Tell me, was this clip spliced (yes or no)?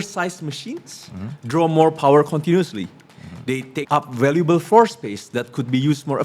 yes